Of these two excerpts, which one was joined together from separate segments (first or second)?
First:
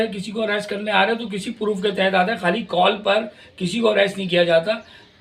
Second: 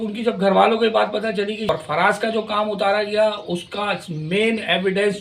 second